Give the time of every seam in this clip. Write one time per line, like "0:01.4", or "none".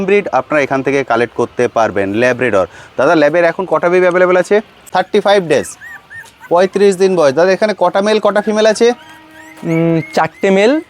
0:04.8